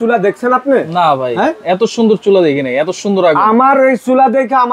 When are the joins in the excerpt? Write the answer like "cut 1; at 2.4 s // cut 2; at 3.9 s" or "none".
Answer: none